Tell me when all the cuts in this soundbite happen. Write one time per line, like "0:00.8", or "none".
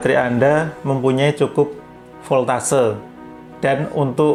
none